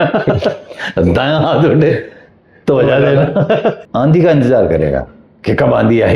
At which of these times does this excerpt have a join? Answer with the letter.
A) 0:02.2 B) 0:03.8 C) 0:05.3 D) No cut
B